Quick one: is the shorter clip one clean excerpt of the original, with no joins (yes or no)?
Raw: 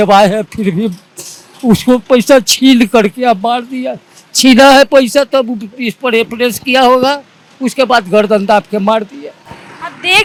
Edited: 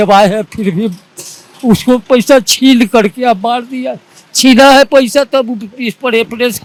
yes